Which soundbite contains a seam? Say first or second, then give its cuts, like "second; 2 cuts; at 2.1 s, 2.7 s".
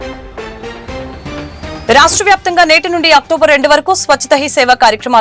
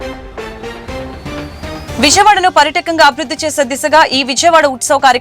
first; 1 cut; at 1.8 s